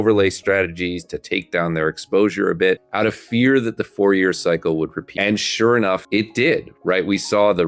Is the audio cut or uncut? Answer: cut